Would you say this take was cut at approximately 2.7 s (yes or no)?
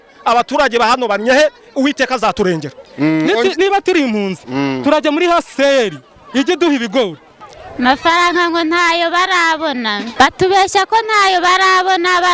yes